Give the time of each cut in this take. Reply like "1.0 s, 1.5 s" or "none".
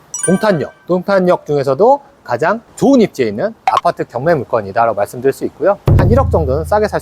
5.8 s